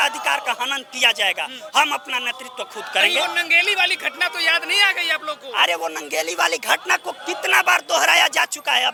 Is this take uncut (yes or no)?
yes